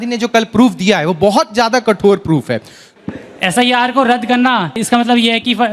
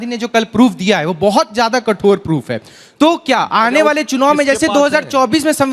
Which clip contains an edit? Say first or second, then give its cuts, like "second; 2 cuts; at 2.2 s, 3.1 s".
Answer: first; 2 cuts; at 2.9 s, 4.8 s